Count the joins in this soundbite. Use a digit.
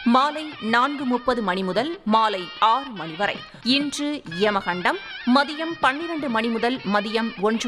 1